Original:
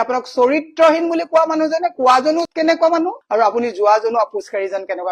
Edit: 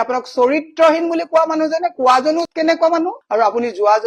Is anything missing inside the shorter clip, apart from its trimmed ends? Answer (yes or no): no